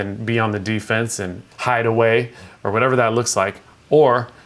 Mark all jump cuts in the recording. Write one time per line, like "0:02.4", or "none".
0:01.4
0:02.5

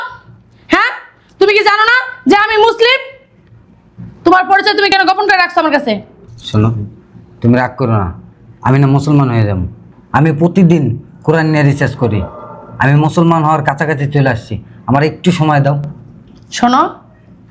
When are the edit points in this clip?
none

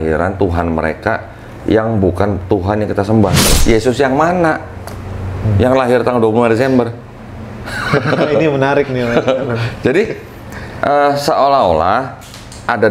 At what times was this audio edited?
0:03.5

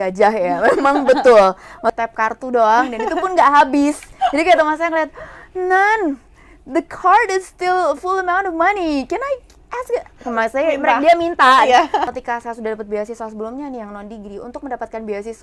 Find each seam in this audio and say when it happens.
0:01.9
0:12.1

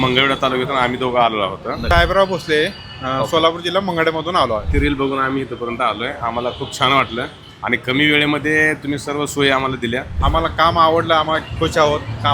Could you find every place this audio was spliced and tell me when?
0:01.8
0:04.7
0:10.1

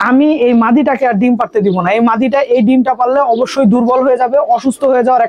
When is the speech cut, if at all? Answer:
none

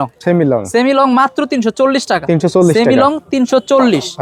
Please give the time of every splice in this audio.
none

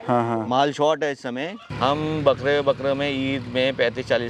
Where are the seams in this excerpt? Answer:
0:01.6

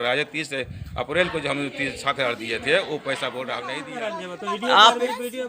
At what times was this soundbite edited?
0:03.8

